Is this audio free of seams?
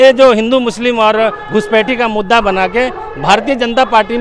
yes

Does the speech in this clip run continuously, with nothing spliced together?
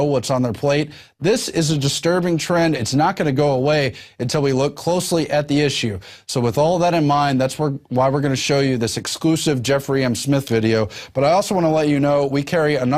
no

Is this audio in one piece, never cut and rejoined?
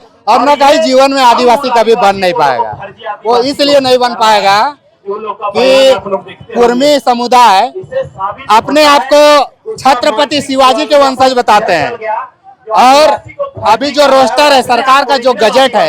yes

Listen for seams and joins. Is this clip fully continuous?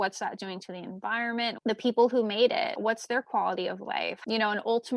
no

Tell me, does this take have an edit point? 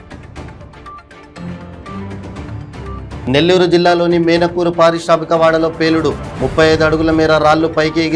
yes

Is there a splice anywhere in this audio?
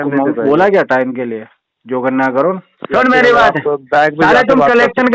yes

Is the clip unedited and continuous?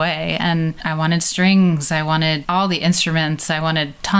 no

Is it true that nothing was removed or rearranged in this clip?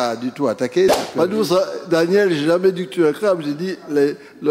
no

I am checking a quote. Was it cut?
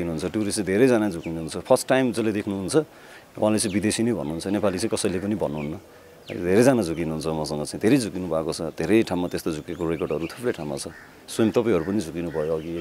no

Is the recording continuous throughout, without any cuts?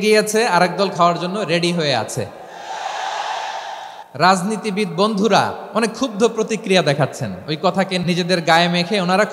no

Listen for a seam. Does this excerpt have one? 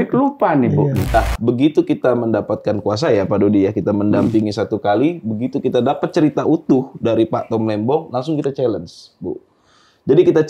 yes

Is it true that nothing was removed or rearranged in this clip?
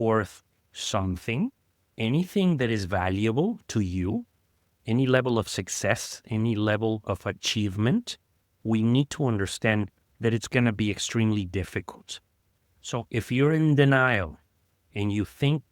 no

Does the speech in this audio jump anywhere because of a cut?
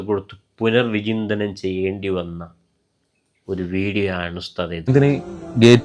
yes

